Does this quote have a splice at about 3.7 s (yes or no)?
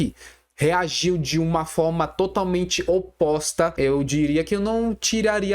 yes